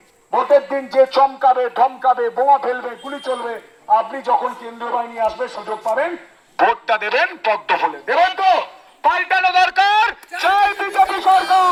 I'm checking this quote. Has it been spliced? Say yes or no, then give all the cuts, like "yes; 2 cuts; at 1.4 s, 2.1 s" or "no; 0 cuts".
no; 0 cuts